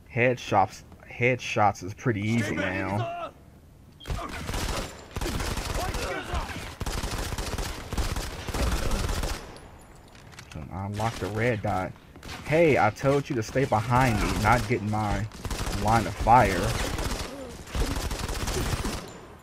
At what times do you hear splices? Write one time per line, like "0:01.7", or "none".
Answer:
0:08.5